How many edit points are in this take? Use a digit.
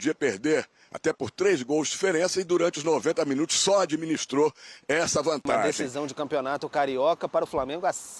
1